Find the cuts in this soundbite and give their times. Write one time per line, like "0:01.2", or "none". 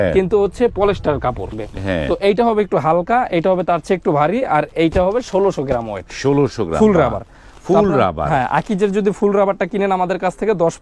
0:01.6